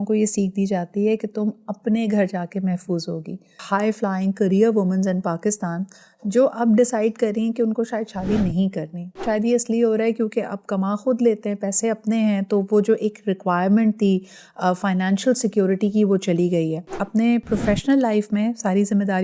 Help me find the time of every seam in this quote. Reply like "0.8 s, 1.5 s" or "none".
3.6 s, 9.2 s, 17.0 s